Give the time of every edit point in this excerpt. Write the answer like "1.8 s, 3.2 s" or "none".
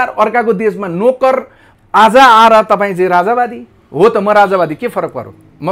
1.6 s

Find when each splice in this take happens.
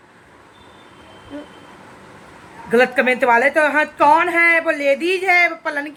none

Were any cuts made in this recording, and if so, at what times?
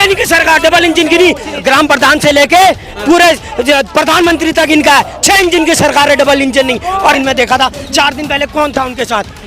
1.5 s, 7.2 s

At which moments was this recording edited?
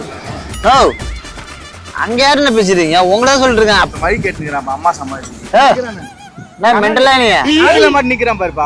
3.9 s, 5.3 s

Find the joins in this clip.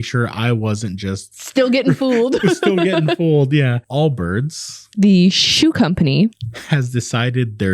3.8 s, 6.4 s

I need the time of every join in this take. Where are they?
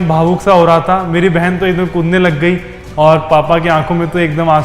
2.8 s

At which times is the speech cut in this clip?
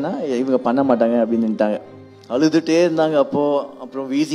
2.0 s

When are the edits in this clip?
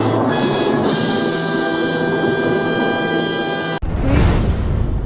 3.7 s

